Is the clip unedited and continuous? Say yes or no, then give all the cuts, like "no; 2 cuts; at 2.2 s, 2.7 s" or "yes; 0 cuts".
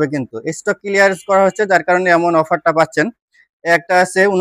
yes; 0 cuts